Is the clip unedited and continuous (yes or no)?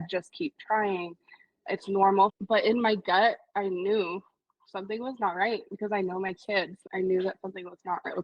no